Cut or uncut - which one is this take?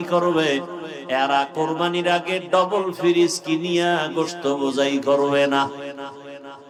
uncut